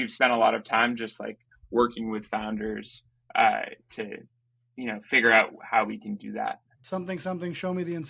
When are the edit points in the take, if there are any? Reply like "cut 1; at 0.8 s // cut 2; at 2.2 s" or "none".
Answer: cut 1; at 6.7 s